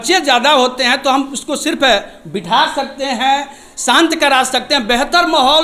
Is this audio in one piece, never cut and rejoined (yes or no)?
yes